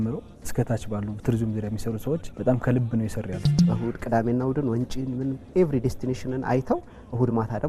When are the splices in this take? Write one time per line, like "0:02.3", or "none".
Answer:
0:02.3
0:03.6